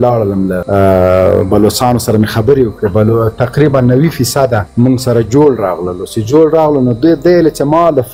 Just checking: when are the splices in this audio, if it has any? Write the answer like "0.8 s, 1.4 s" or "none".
4.6 s